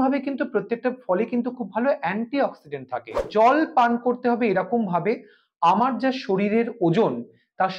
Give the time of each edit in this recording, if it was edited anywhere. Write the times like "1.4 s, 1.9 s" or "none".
3.2 s